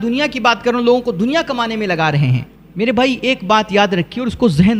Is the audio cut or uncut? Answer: uncut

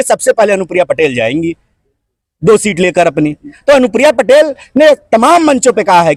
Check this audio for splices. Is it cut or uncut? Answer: uncut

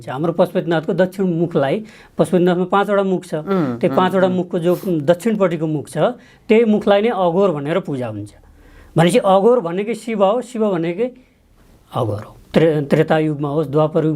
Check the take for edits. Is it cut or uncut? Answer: cut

